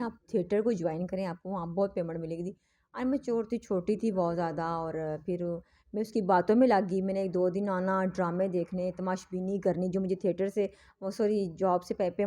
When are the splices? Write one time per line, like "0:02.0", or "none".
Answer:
none